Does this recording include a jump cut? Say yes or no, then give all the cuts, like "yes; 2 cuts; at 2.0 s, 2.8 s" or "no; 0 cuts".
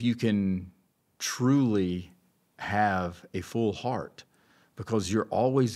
no; 0 cuts